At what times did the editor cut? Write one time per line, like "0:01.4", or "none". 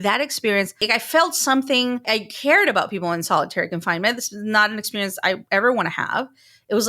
0:00.8
0:02.1